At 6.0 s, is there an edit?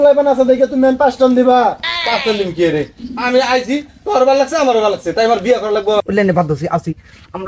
yes; 1 cut; at 6.0 s

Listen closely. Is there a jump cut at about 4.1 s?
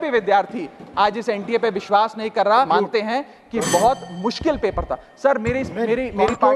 no; 1 cut; at 2.7 s

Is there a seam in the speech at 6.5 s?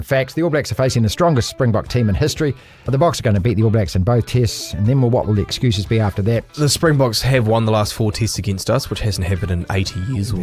yes; 2 cuts; at 2.9 s, 6.5 s

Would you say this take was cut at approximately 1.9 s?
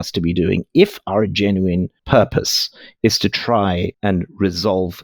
no; 1 cut; at 3.9 s

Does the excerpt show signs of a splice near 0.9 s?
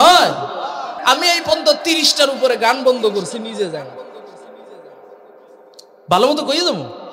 yes; 1 cut; at 0.9 s

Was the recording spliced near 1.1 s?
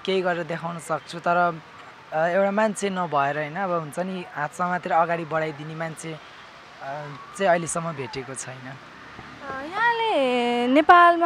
no; 0 cuts

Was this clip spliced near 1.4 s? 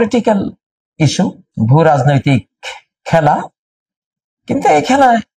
yes; 1 cut; at 1.4 s

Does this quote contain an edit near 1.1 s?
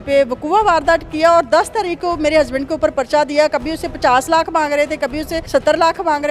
no; 1 cut; at 5.4 s

